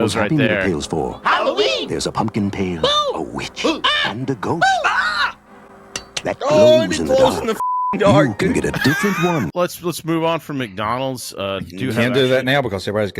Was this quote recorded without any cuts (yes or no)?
no